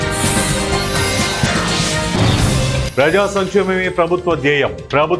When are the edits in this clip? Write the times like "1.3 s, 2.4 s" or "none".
2.6 s

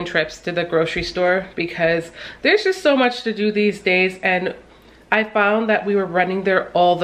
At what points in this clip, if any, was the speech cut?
none

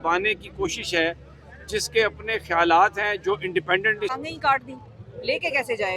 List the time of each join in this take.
4.1 s

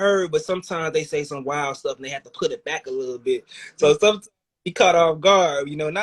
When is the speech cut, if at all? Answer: none

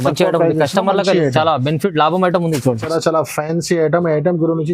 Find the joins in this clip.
2.8 s

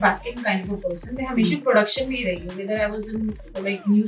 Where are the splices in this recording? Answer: none

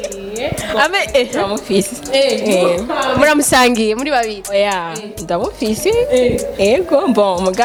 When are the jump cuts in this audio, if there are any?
none

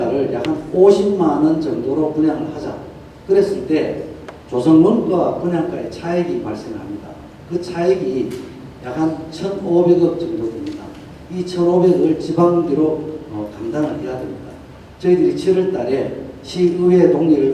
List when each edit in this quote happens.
none

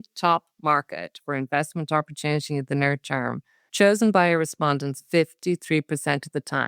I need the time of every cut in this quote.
none

